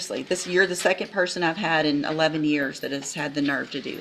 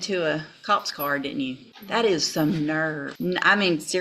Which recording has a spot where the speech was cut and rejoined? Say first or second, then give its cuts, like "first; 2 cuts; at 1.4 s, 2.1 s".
second; 2 cuts; at 1.7 s, 3.1 s